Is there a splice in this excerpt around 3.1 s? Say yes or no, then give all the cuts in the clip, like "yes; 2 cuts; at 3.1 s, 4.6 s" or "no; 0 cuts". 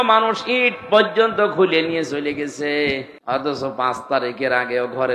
yes; 1 cut; at 3.1 s